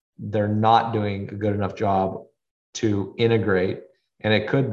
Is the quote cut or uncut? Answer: uncut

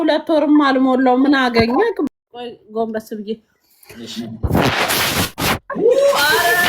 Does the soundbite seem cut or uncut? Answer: cut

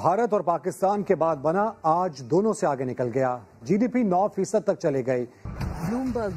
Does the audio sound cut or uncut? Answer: cut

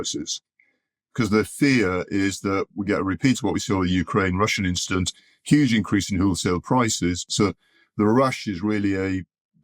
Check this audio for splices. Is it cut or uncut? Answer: cut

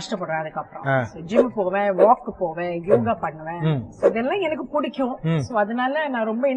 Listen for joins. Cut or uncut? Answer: uncut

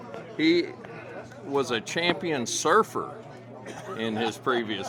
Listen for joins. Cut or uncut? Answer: uncut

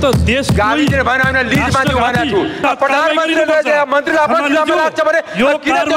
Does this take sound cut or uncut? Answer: cut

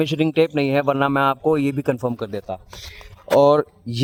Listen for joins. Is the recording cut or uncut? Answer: uncut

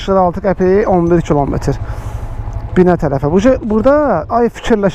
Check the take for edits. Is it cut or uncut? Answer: uncut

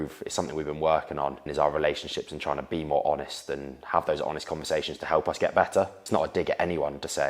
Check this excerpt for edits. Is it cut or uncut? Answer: cut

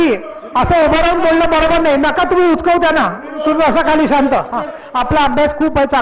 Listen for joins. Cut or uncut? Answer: cut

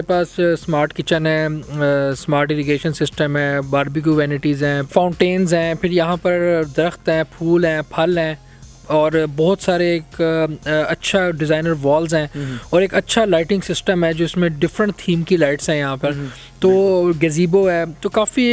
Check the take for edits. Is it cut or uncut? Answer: uncut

